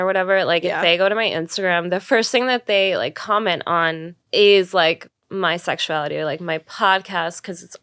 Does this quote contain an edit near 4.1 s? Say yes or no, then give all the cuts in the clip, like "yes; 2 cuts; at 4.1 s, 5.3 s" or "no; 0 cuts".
yes; 2 cuts; at 4.1 s, 5.2 s